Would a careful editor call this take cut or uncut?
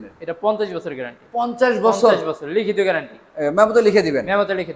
uncut